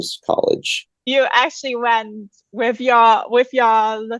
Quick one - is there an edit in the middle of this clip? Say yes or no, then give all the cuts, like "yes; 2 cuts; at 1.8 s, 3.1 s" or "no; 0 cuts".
yes; 1 cut; at 1.0 s